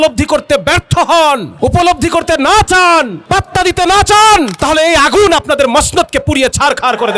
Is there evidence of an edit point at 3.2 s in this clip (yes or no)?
yes